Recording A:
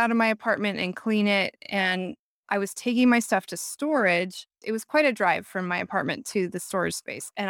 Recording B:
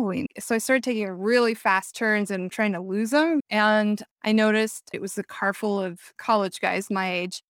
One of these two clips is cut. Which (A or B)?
B